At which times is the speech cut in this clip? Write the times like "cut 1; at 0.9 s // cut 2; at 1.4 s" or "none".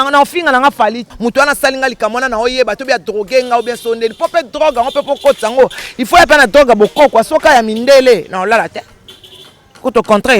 cut 1; at 1.1 s